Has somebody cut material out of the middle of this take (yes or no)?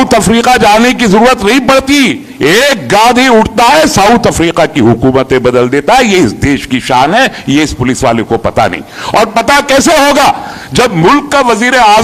no